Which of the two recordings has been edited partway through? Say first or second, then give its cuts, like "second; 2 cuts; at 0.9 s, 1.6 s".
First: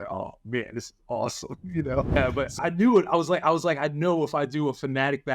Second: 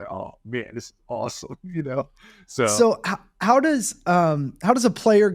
first; 1 cut; at 2.2 s